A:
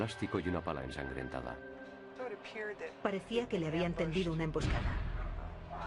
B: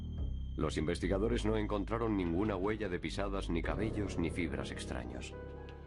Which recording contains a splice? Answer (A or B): B